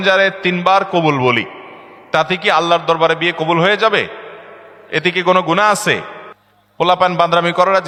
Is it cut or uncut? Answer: uncut